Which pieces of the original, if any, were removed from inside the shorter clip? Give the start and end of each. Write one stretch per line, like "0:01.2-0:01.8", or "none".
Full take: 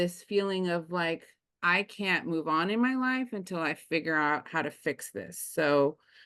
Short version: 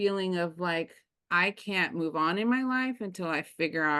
none